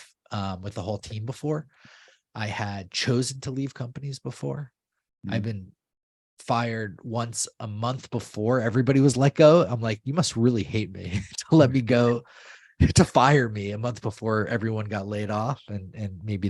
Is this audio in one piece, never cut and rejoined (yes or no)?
yes